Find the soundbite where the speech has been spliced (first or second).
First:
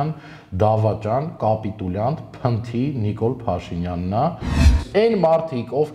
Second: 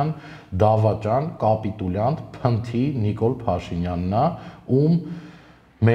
first